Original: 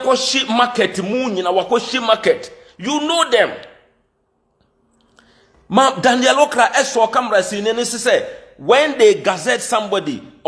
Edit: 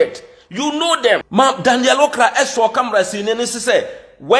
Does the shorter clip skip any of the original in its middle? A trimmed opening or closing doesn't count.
yes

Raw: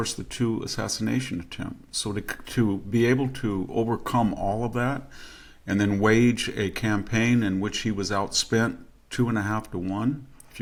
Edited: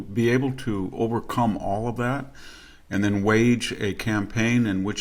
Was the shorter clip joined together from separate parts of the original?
no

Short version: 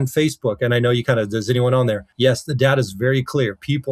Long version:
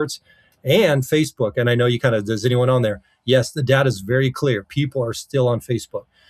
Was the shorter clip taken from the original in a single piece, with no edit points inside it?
no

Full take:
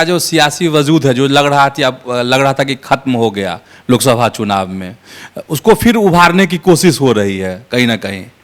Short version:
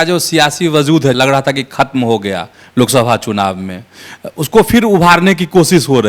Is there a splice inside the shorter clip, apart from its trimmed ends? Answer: yes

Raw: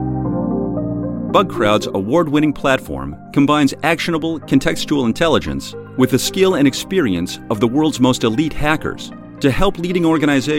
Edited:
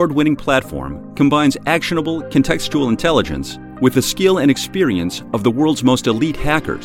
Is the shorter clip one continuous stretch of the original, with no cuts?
yes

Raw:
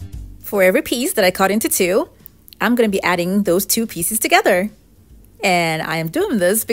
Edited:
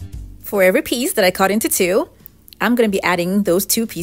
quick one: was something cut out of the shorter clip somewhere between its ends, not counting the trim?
no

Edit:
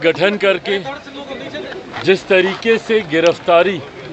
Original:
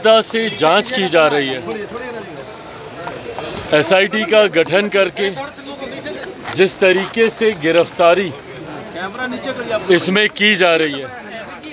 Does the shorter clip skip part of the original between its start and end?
no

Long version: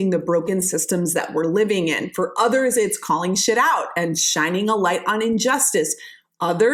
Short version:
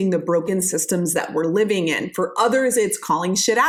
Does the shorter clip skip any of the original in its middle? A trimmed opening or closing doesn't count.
no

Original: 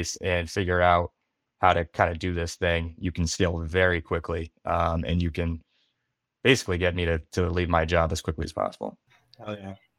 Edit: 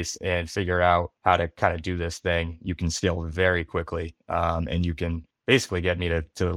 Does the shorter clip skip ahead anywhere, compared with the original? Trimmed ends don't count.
yes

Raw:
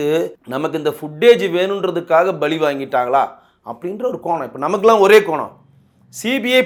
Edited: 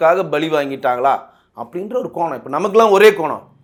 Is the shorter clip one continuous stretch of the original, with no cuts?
yes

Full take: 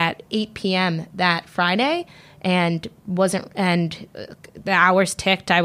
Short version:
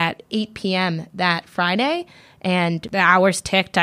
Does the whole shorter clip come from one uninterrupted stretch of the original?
no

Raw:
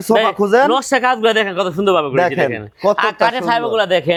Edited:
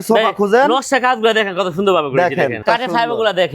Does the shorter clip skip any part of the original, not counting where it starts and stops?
yes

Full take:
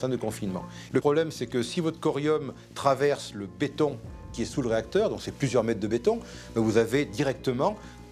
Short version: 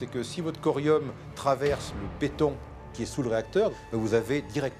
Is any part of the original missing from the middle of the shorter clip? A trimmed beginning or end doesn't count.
yes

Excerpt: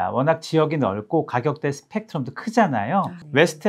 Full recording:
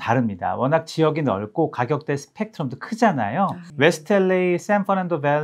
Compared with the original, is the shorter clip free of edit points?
yes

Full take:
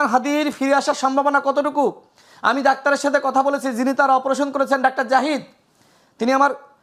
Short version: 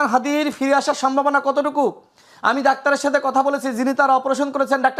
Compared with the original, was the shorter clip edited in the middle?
no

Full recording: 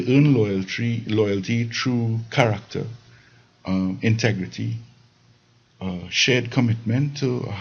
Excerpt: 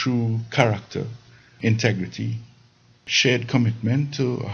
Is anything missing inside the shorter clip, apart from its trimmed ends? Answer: yes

